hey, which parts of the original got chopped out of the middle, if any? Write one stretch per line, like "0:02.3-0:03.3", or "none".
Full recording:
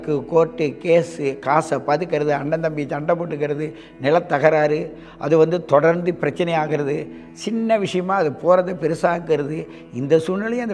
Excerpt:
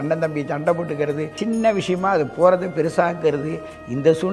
0:03.7-0:07.4